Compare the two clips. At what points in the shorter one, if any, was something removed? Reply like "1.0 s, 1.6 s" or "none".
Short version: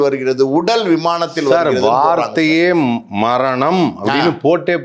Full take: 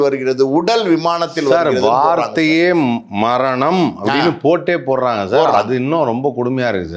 none